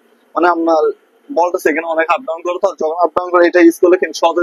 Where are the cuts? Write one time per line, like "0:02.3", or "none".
none